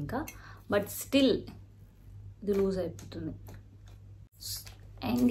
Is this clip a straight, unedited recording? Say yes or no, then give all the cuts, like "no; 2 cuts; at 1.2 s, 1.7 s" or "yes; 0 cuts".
no; 1 cut; at 4.3 s